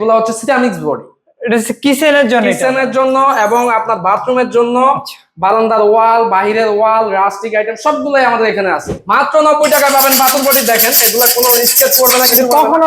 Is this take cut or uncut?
cut